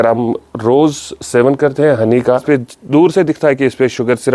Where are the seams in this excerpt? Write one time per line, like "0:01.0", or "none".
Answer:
0:02.4